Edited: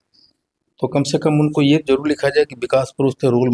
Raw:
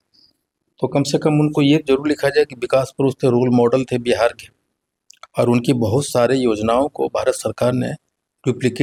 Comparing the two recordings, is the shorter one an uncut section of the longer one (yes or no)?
yes